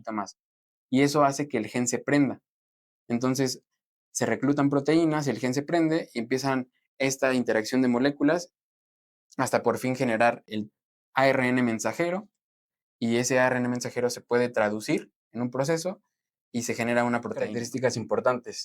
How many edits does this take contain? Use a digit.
1